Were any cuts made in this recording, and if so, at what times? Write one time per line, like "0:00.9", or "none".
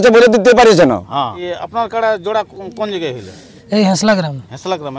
0:01.4